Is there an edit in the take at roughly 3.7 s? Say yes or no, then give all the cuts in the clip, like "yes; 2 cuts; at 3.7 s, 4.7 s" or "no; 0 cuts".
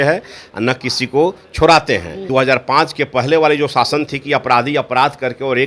no; 1 cut; at 2.3 s